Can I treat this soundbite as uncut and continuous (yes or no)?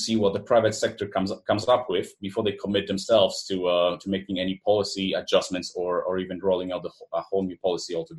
yes